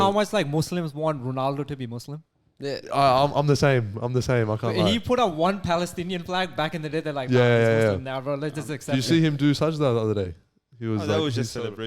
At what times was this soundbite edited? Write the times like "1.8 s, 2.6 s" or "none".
none